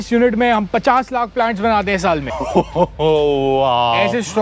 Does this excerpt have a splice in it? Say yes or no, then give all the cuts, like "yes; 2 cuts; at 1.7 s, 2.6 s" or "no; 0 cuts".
yes; 1 cut; at 2.3 s